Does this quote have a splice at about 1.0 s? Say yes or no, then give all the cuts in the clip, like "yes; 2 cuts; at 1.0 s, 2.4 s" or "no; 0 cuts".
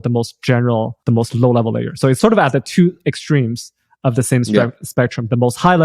yes; 2 cuts; at 1.0 s, 2.2 s